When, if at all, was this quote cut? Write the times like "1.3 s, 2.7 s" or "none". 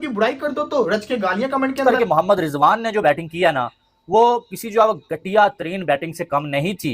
1.8 s